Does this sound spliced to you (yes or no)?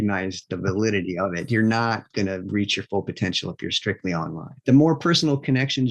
yes